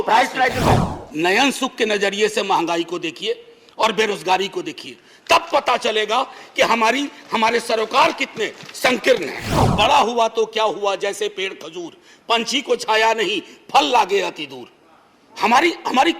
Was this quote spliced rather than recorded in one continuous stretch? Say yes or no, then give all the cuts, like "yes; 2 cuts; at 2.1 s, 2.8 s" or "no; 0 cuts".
yes; 2 cuts; at 0.9 s, 9.6 s